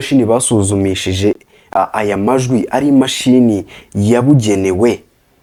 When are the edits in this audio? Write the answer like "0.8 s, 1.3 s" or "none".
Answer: none